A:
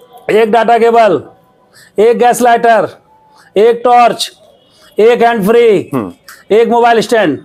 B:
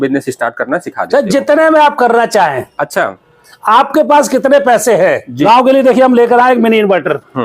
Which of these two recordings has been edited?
B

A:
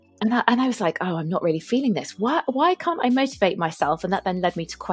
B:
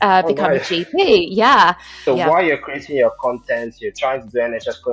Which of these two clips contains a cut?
B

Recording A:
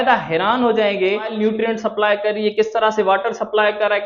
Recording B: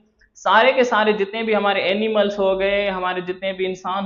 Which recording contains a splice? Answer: A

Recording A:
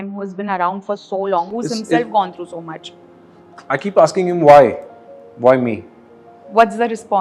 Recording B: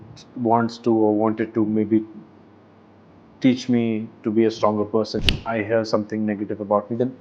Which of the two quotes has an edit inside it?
B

